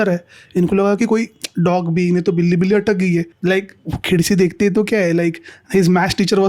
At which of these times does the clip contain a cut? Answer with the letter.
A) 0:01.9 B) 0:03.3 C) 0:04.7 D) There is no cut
B